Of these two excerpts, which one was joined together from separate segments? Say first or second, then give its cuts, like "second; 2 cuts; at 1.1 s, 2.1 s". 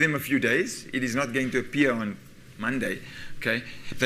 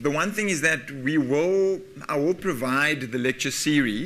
second; 1 cut; at 2.6 s